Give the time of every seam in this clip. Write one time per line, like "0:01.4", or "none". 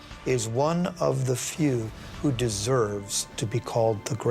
0:03.4